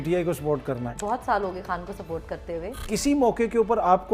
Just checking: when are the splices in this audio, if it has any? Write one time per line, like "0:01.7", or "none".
0:01.0
0:02.9